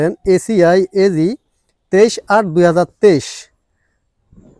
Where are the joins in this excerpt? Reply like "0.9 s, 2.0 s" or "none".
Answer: none